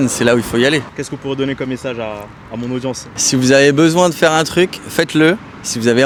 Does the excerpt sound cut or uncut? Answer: uncut